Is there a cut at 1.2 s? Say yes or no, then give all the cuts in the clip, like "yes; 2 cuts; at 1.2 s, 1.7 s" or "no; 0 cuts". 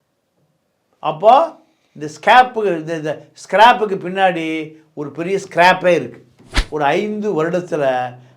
no; 1 cut; at 6.6 s